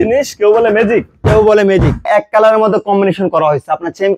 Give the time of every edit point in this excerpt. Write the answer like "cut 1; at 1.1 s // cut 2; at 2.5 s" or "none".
cut 1; at 2.1 s